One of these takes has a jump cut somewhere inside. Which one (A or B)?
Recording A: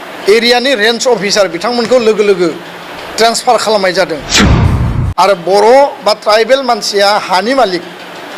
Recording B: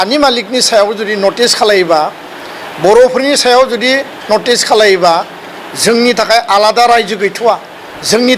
A